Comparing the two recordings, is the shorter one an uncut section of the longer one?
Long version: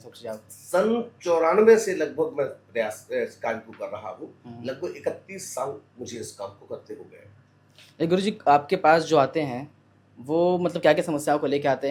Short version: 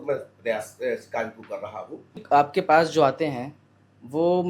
no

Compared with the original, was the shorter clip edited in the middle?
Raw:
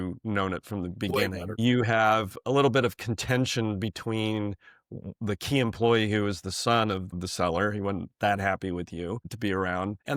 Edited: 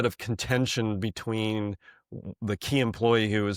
no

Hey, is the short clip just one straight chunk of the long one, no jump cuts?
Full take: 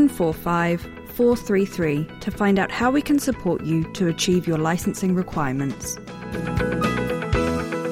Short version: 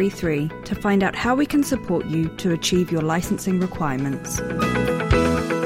no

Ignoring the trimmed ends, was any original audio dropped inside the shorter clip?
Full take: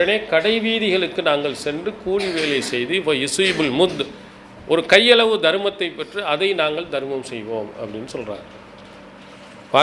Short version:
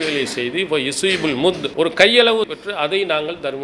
yes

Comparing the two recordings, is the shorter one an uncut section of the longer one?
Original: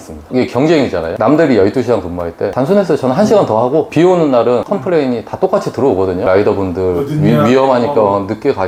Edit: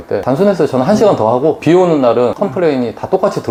yes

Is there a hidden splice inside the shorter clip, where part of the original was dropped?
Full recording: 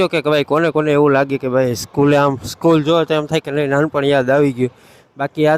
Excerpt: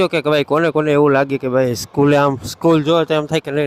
no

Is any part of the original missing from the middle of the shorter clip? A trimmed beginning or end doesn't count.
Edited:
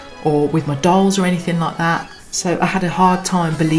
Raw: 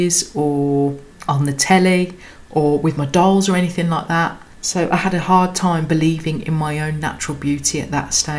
no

